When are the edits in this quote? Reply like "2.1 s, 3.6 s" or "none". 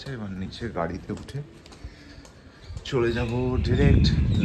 none